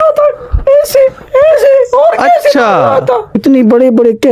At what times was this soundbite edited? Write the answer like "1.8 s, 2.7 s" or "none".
3.4 s

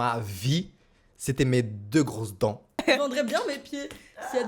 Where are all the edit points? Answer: 2.8 s

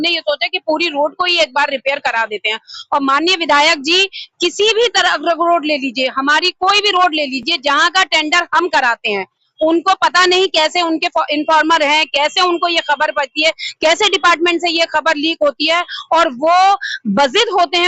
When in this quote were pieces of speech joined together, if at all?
none

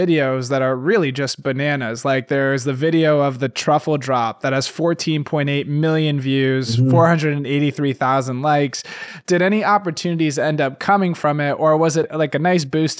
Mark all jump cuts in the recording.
9.1 s, 12.1 s

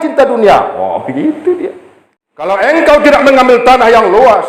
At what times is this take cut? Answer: 2.5 s

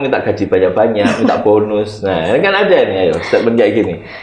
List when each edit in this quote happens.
none

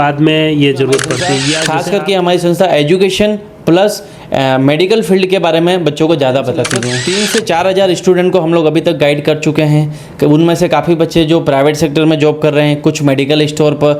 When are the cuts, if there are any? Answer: 1.6 s, 7.0 s

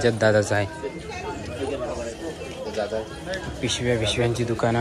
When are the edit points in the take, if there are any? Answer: none

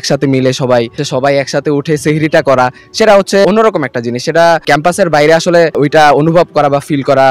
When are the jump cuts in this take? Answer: 1.0 s, 3.4 s, 4.6 s, 5.8 s

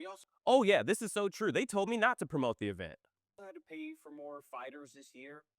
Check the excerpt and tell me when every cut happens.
none

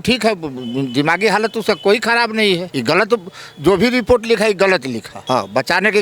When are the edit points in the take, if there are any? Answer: 2.7 s, 5.1 s

